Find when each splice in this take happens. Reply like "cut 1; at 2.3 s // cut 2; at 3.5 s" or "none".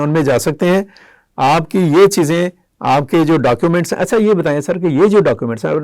none